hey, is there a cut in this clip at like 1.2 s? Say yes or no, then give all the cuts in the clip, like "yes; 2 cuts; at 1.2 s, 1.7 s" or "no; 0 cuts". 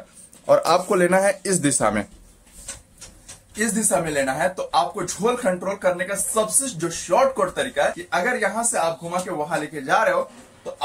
no; 1 cut; at 8.0 s